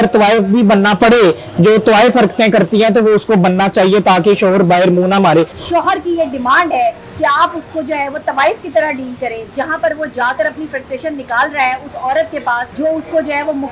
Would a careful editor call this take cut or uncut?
cut